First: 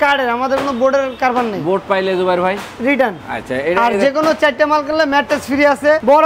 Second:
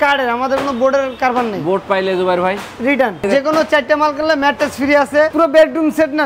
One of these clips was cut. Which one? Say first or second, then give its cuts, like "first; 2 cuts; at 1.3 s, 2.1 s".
second; 2 cuts; at 3.2 s, 5.3 s